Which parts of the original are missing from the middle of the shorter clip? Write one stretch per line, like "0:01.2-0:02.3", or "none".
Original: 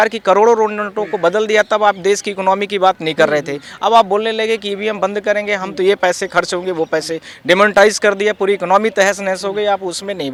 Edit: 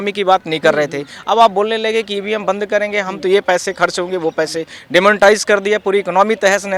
none